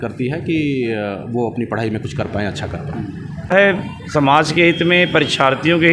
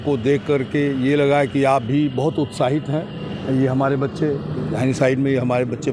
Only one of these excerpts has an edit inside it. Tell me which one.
first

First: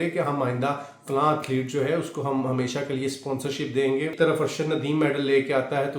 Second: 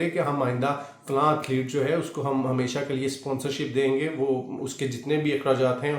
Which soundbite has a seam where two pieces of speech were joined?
first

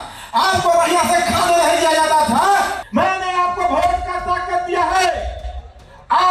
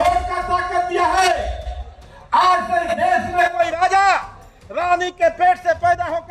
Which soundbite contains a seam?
first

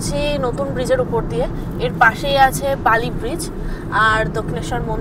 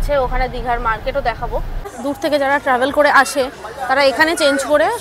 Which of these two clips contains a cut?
second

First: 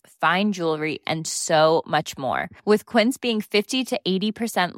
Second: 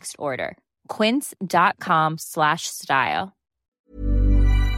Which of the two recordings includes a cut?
second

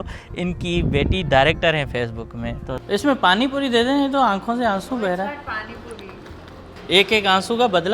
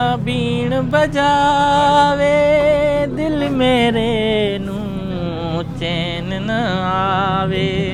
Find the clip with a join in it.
first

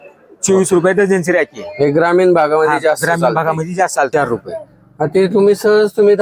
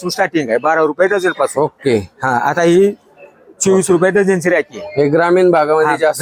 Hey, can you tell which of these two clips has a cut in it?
first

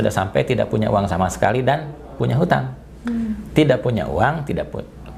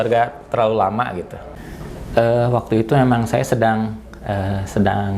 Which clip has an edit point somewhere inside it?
second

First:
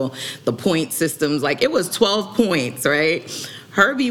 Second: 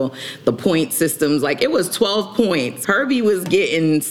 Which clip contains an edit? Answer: second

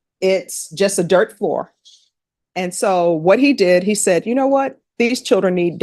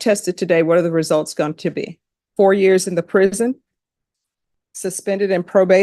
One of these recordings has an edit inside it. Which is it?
second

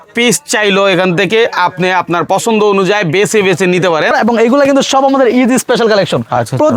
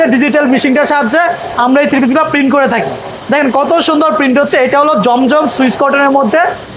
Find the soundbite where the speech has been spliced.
first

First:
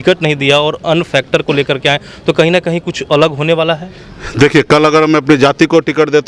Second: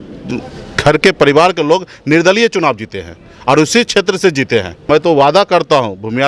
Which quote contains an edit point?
second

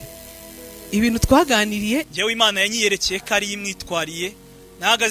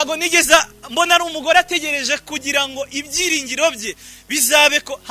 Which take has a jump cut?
first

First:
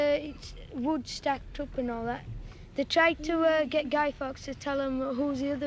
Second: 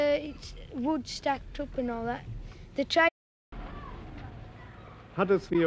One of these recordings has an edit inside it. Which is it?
first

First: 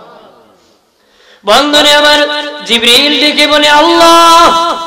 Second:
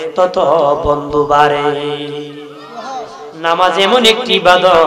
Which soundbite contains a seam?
second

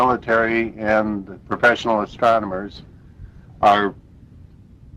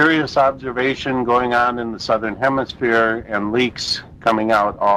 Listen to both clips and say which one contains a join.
first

